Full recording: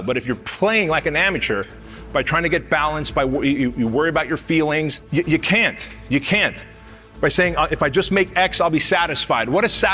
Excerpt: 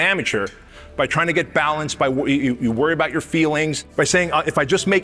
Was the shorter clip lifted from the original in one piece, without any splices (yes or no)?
no